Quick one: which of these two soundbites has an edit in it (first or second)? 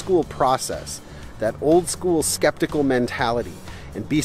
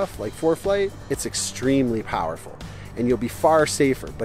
second